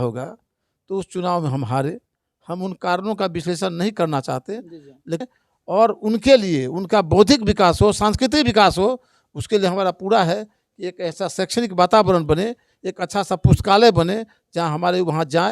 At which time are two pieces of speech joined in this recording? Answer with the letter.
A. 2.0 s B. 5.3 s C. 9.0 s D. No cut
B